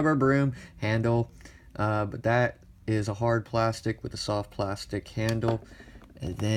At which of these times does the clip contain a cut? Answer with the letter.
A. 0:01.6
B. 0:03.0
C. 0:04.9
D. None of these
B